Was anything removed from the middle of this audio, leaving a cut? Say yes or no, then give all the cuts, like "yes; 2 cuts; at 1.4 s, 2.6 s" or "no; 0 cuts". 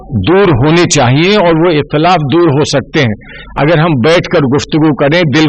no; 0 cuts